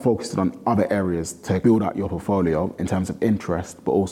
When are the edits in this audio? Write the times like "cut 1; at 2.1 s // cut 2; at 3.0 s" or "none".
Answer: cut 1; at 1.6 s